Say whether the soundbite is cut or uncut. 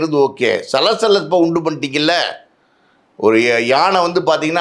uncut